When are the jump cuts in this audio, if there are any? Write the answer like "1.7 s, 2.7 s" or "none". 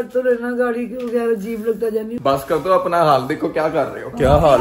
2.1 s